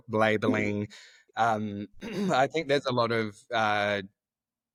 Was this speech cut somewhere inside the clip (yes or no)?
no